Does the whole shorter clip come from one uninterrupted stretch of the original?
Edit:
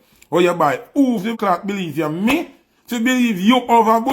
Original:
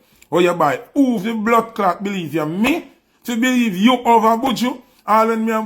no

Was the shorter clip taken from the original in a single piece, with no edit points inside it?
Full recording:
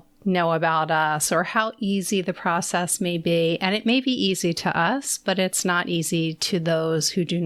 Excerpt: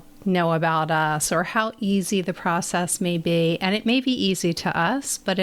yes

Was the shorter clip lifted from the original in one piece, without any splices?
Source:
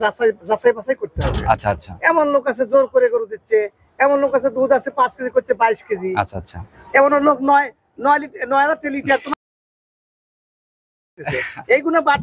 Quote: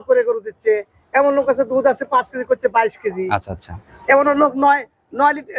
yes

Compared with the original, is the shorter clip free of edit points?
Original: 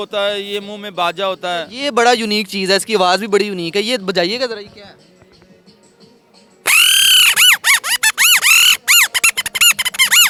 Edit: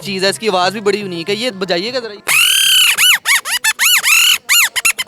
no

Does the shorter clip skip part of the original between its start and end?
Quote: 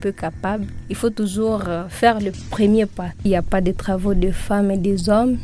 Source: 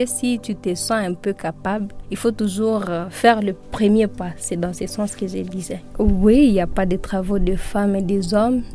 yes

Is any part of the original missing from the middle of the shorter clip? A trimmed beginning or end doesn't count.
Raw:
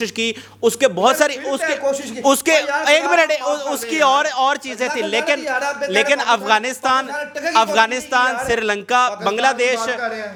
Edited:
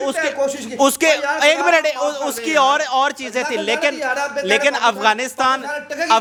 no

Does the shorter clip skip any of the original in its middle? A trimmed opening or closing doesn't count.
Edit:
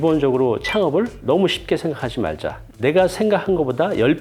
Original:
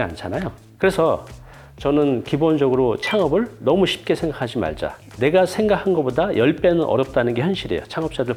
no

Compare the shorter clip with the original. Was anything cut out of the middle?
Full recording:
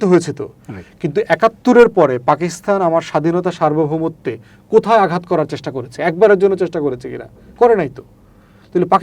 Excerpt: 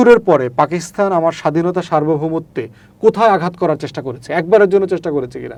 no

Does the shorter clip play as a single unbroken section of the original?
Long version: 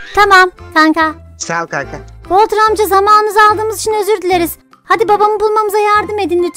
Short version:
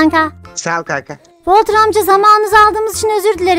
yes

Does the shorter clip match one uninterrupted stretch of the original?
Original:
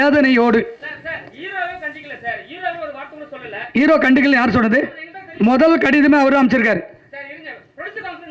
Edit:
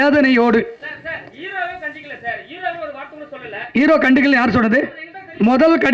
yes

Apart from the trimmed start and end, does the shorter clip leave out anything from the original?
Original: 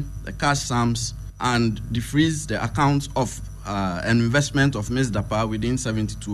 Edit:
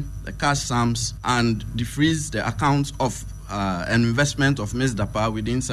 yes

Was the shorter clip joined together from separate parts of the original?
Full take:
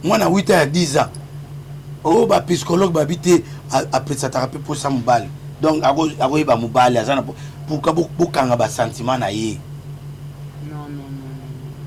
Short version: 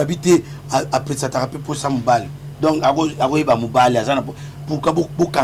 no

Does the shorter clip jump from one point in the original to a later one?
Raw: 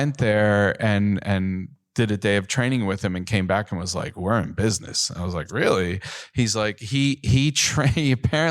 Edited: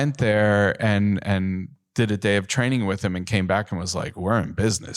no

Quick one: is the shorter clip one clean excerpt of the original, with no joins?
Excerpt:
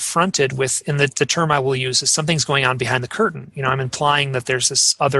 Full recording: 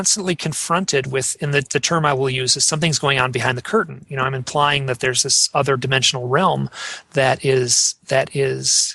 yes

